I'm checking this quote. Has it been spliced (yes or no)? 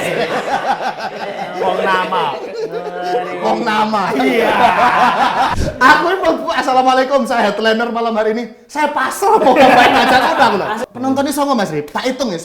yes